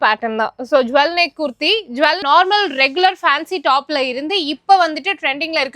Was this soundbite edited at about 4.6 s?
no; 1 cut; at 2.2 s

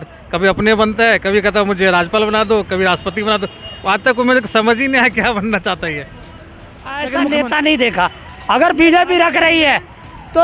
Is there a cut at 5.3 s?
no; 1 cut; at 7.1 s

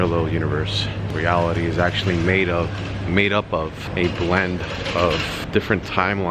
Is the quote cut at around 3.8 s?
yes; 3 cuts; at 1.1 s, 3.8 s, 5.4 s

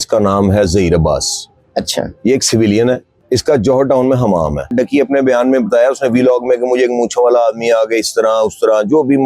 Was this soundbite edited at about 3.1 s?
yes; 2 cuts; at 3.1 s, 4.7 s

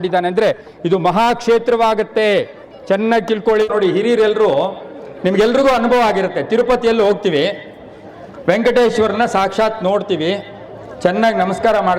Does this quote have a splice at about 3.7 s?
yes; 1 cut; at 3.7 s

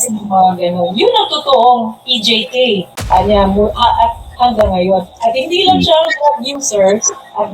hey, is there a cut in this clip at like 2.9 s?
yes; 1 cut; at 2.9 s

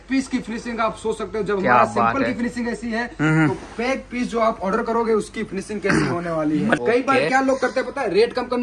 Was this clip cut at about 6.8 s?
yes; 1 cut; at 6.8 s

